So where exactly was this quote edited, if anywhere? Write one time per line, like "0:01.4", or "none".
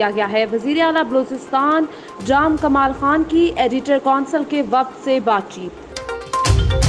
0:05.8